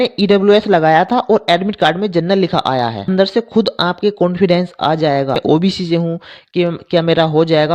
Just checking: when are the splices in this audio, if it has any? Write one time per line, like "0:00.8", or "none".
0:03.0